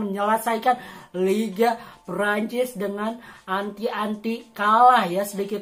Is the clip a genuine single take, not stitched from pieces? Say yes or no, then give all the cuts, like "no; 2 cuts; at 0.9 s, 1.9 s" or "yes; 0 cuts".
yes; 0 cuts